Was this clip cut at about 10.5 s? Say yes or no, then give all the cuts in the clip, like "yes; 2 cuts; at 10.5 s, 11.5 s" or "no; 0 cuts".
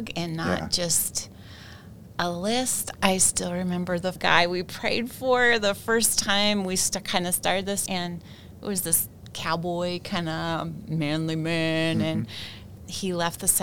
no; 2 cuts; at 2.8 s, 7.8 s